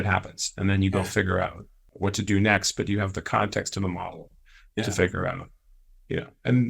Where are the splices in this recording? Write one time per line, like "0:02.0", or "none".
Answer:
0:01.9